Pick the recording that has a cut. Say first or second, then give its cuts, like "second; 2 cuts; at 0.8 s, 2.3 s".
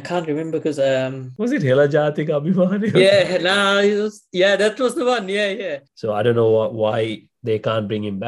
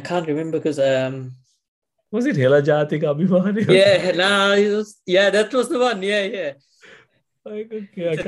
first; 2 cuts; at 1.2 s, 5.8 s